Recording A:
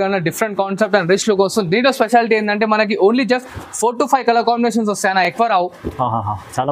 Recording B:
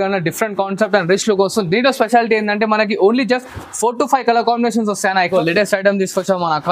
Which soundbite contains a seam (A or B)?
B